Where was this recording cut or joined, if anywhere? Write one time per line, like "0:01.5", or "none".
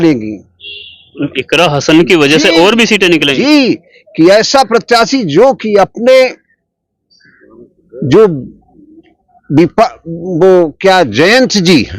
none

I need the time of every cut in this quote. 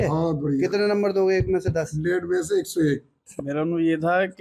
0:03.2

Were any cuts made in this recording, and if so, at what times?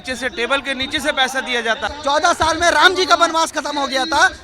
0:01.9

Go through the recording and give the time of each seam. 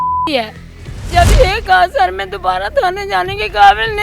0:01.1

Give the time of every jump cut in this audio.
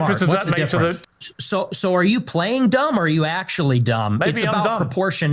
0:01.0

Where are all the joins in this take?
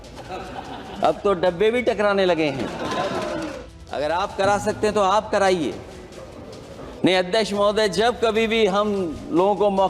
0:03.4

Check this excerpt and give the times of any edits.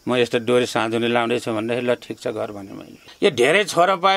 0:03.1

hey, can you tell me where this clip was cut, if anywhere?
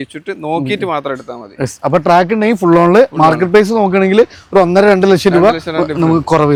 none

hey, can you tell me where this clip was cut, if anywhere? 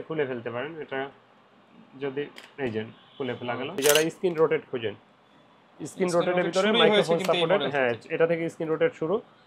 0:03.8

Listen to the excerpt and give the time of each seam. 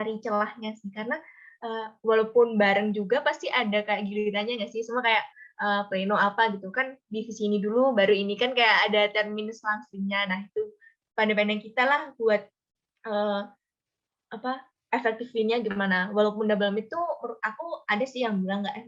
none

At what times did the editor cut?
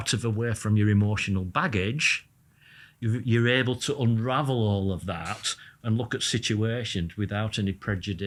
none

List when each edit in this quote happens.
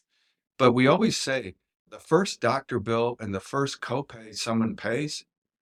none

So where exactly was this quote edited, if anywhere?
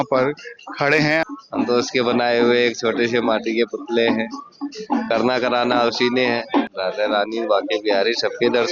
0:01.2
0:06.7

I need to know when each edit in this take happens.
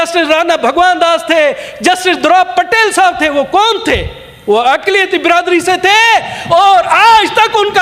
none

